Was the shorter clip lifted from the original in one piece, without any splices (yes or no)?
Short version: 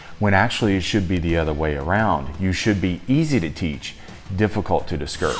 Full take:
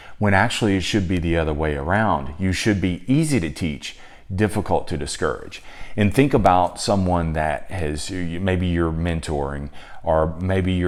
yes